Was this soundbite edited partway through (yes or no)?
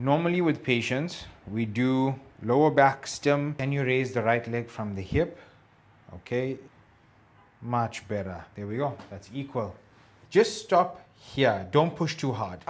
yes